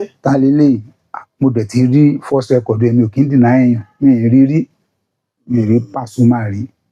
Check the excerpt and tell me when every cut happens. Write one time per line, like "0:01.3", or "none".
none